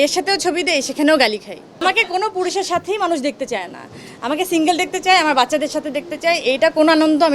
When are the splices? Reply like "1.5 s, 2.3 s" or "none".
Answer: 1.8 s